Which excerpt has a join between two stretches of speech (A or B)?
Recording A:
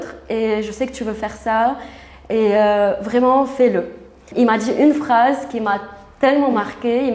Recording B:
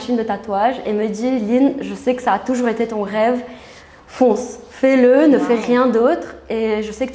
A